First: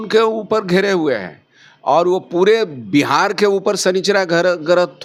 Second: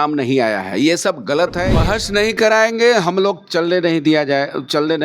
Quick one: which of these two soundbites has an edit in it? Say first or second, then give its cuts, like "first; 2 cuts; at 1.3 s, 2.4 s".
second; 1 cut; at 1.7 s